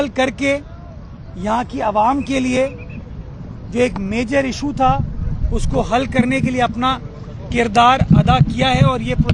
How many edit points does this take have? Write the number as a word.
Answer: zero